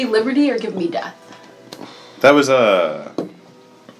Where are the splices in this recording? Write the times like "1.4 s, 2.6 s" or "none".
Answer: none